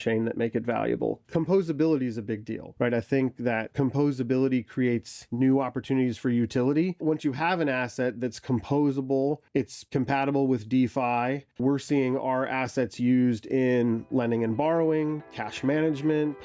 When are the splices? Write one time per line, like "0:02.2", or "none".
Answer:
0:07.0
0:11.4